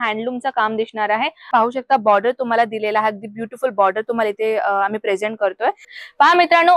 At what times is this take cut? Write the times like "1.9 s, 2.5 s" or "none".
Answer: 1.5 s, 5.9 s